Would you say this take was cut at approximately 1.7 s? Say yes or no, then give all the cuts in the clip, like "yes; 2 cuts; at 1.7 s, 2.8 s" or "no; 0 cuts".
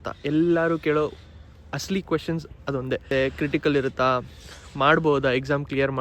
no; 1 cut; at 3.1 s